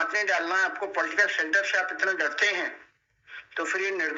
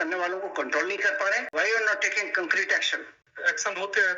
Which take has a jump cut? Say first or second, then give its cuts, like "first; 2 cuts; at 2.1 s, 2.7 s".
second; 2 cuts; at 1.5 s, 3.2 s